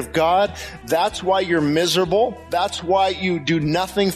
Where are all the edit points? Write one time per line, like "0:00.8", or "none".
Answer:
0:02.4